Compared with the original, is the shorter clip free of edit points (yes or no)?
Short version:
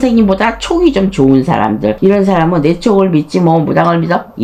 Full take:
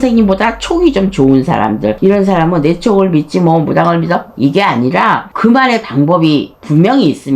yes